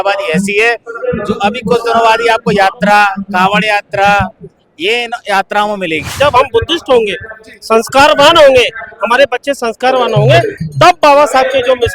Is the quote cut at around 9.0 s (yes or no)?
no